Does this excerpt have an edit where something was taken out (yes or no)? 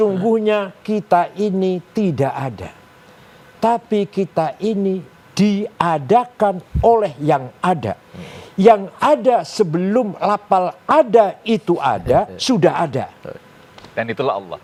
no